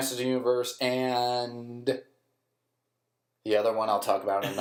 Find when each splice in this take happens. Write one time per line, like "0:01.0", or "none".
none